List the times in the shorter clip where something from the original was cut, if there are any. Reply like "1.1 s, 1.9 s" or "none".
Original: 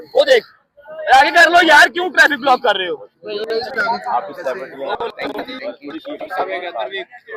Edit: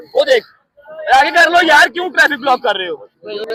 none